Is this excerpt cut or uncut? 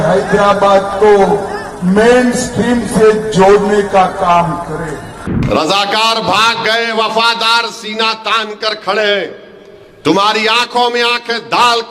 cut